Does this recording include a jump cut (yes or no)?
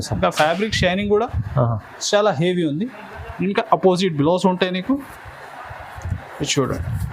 no